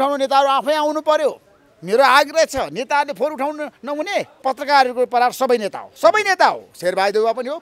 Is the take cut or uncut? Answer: cut